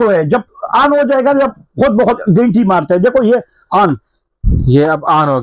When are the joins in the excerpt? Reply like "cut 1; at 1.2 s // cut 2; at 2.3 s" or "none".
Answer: none